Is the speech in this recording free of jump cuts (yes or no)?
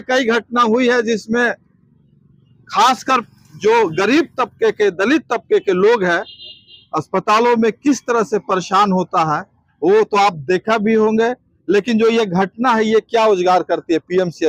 yes